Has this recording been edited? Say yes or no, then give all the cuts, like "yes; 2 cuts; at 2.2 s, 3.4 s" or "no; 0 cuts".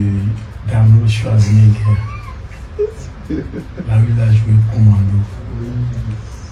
no; 0 cuts